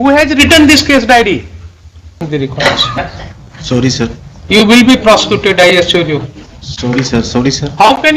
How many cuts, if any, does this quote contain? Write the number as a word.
one